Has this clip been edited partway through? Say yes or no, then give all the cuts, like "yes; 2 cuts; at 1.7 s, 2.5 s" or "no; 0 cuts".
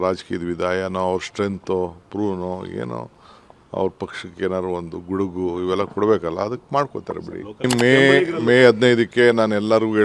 yes; 1 cut; at 7.7 s